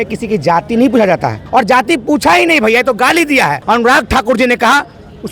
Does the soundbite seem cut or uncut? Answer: cut